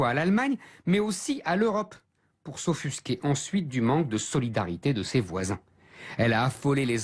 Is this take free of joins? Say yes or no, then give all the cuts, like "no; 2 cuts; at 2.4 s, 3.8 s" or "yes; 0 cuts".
no; 1 cut; at 4.4 s